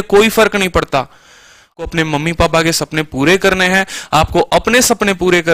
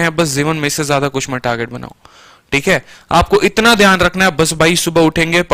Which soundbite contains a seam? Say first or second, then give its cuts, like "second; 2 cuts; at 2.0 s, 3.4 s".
first; 1 cut; at 1.8 s